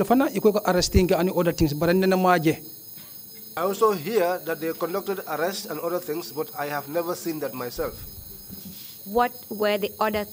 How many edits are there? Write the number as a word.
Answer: zero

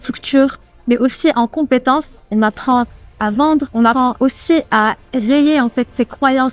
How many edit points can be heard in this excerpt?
one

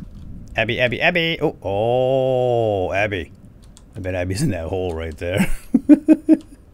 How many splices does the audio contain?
zero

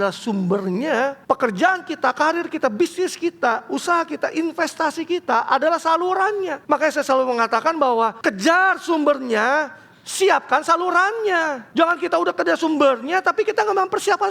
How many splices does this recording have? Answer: four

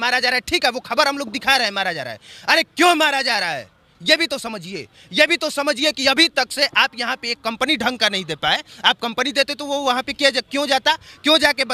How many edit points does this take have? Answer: zero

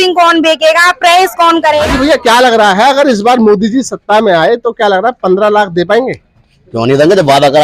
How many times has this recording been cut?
one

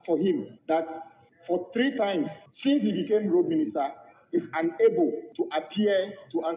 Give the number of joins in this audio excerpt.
two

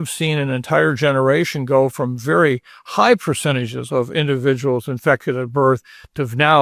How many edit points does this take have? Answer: zero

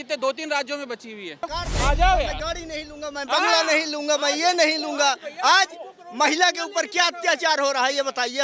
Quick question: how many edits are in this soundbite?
one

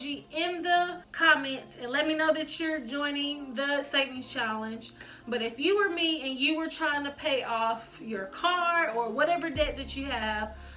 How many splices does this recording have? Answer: one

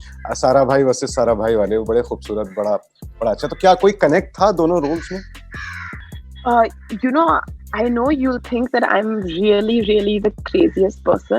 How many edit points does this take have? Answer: zero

